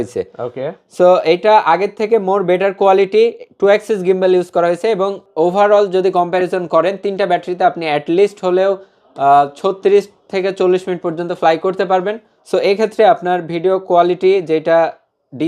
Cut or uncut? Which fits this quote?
cut